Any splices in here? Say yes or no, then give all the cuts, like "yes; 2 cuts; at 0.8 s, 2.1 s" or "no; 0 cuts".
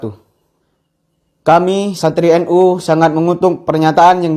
no; 0 cuts